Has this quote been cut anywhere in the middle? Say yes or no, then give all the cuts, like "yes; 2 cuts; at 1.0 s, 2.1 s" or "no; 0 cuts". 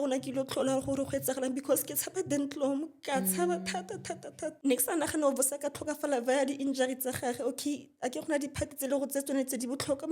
yes; 1 cut; at 4.5 s